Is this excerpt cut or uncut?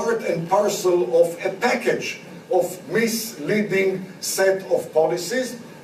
uncut